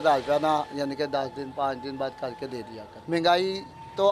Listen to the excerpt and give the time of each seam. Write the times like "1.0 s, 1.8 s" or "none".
none